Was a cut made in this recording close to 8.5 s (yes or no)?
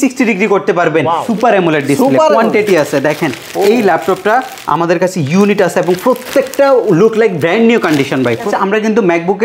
yes